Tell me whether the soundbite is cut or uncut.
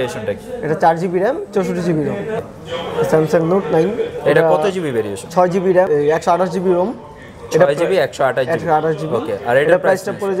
cut